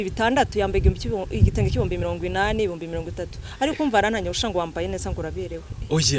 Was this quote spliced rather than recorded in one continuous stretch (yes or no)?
no